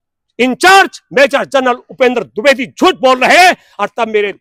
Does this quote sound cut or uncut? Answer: uncut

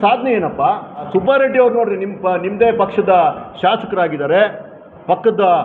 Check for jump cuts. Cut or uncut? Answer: cut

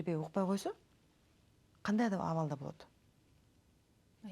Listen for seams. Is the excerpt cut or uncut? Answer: uncut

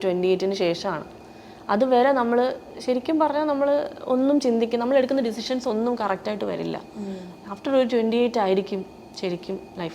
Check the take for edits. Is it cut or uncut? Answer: uncut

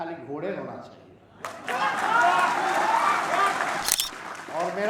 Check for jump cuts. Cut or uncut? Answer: cut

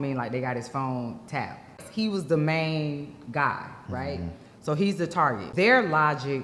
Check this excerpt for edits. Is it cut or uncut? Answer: cut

